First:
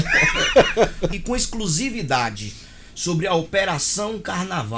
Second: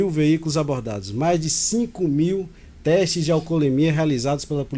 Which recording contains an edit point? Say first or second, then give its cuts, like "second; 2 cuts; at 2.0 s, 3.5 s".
first; 1 cut; at 1.2 s